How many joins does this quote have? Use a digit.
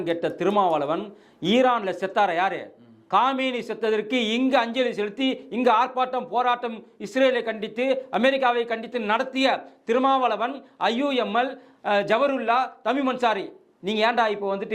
0